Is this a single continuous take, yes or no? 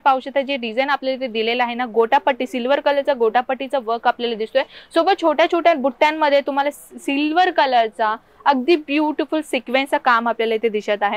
yes